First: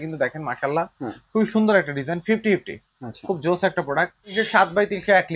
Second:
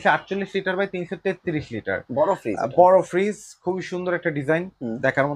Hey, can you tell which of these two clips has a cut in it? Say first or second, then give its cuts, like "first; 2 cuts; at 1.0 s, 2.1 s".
first; 1 cut; at 4.2 s